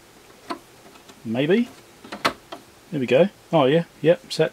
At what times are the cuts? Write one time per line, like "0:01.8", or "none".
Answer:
0:03.4